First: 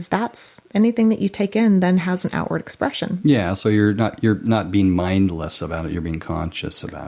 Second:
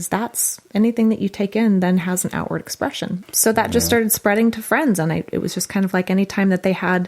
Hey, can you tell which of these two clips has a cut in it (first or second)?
second